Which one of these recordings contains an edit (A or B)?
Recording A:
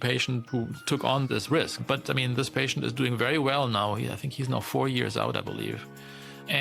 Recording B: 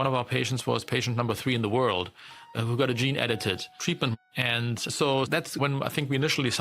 B